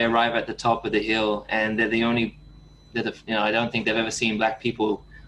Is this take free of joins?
yes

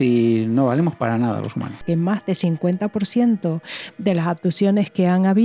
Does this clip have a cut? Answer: yes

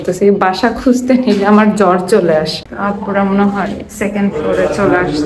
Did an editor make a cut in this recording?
yes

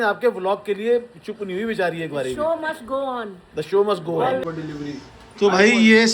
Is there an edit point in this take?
yes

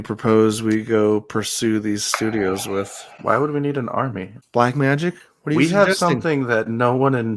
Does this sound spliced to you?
yes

